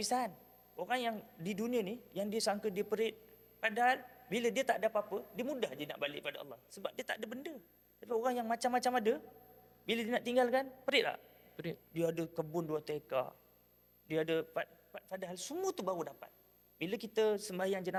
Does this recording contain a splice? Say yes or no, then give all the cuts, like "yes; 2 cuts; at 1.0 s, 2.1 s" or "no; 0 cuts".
no; 0 cuts